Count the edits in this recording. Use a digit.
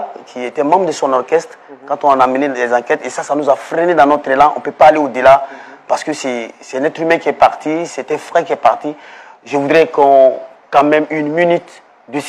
0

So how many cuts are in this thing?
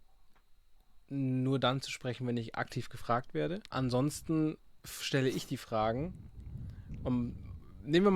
1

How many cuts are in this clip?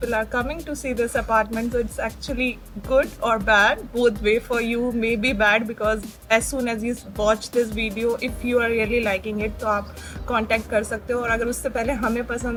0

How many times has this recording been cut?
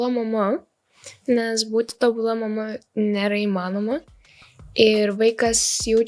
0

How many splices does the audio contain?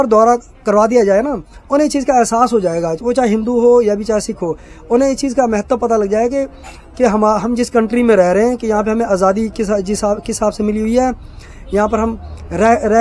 0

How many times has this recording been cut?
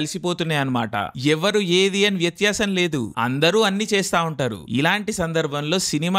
1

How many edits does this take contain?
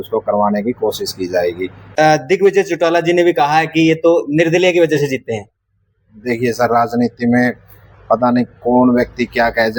1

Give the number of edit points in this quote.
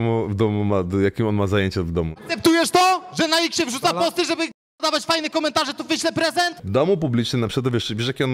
2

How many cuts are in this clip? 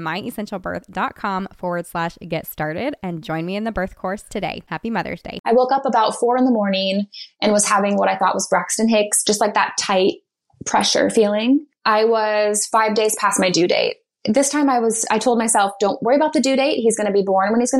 2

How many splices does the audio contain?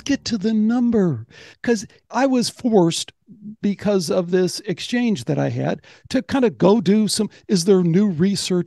1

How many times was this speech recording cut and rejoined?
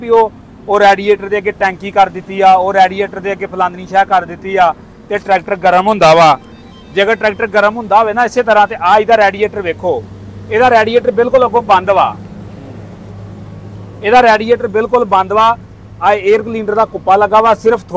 0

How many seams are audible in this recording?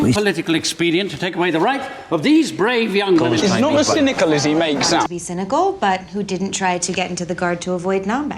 2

